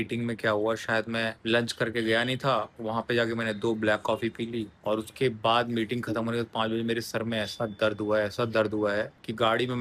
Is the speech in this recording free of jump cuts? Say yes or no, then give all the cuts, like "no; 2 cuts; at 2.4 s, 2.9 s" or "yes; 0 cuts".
yes; 0 cuts